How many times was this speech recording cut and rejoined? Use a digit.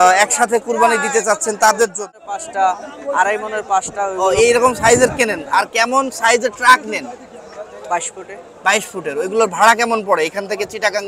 1